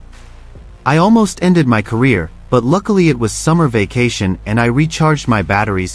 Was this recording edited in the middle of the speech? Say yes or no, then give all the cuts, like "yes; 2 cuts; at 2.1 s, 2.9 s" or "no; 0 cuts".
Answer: no; 0 cuts